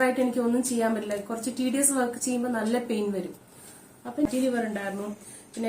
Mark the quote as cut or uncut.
cut